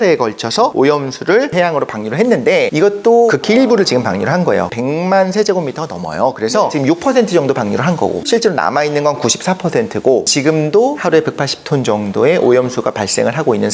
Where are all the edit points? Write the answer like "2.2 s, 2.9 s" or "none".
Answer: 4.7 s, 10.3 s